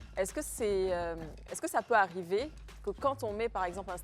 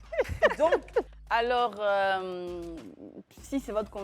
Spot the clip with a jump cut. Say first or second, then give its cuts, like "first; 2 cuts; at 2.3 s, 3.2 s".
second; 1 cut; at 1.1 s